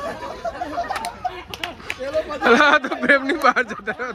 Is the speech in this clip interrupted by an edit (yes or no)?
no